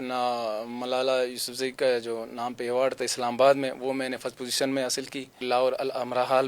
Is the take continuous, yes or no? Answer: no